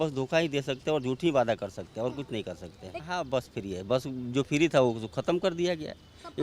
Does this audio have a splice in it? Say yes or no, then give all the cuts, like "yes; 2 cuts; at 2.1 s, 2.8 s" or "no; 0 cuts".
yes; 1 cut; at 3.0 s